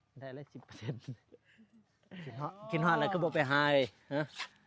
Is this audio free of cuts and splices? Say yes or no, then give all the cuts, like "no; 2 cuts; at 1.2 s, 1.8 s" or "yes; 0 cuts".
no; 1 cut; at 2.4 s